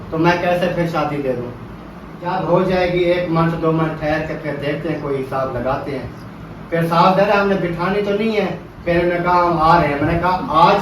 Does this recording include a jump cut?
yes; 2 cuts; at 2.3 s, 8.7 s

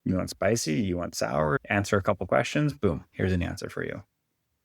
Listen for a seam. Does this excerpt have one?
yes; 1 cut; at 1.6 s

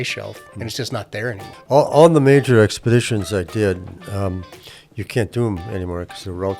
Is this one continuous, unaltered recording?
no; 1 cut; at 1.5 s

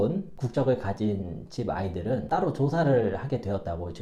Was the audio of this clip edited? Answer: no; 0 cuts

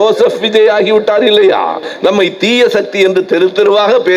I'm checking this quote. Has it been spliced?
yes; 1 cut; at 1.9 s

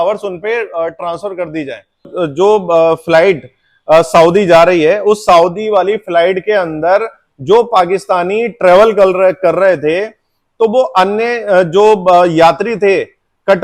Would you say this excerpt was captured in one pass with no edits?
no; 1 cut; at 2.1 s

